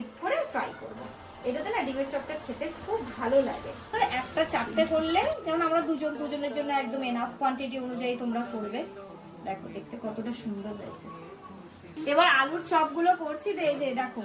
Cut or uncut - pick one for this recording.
cut